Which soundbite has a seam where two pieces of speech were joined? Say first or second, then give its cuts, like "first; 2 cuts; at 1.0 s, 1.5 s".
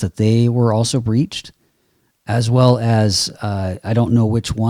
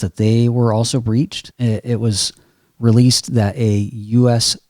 second; 1 cut; at 1.4 s